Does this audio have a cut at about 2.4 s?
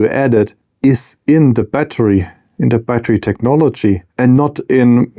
no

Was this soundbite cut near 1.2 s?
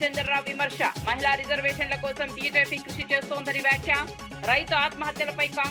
no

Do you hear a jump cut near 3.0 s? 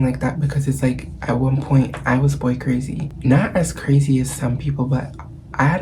yes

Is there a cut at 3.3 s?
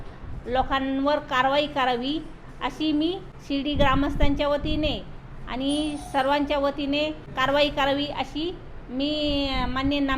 yes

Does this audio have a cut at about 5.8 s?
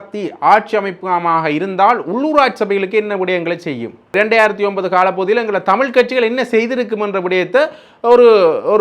no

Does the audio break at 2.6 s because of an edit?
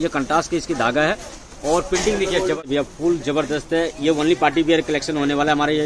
yes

